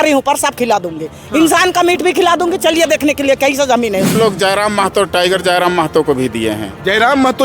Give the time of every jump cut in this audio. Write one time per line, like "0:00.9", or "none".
0:04.1